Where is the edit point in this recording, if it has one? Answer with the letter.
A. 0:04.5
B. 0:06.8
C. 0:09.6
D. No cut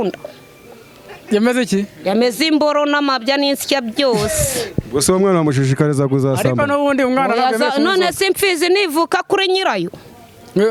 D